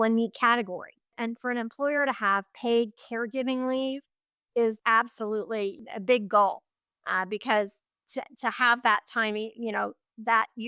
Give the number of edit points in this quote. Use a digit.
3